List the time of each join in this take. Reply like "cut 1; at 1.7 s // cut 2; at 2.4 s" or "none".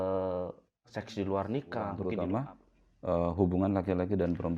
cut 1; at 2.0 s